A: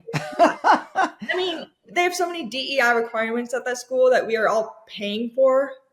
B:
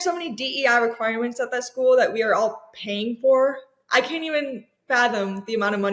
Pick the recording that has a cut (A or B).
A